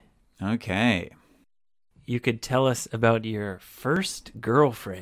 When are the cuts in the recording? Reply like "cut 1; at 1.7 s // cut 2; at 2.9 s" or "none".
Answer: cut 1; at 1.9 s